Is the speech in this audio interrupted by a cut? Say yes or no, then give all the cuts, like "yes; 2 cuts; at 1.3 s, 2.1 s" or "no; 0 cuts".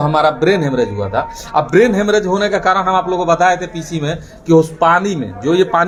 no; 0 cuts